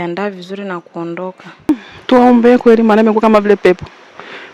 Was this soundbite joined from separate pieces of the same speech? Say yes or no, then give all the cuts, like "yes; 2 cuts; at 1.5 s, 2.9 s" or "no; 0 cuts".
yes; 1 cut; at 1.5 s